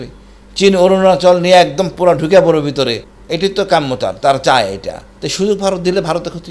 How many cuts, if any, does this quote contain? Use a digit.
1